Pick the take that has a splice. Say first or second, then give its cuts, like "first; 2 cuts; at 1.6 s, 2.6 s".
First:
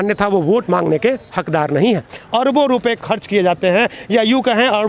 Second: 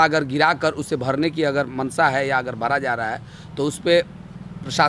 first; 1 cut; at 2.2 s